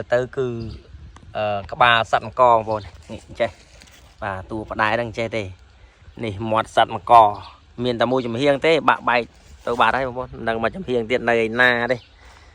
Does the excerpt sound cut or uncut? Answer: uncut